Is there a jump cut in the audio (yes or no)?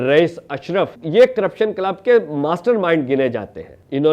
yes